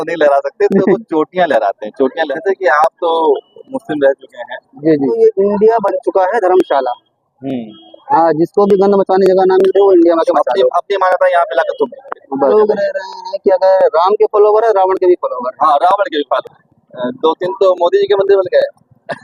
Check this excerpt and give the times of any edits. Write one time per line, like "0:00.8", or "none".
0:02.2
0:05.2
0:12.5
0:16.6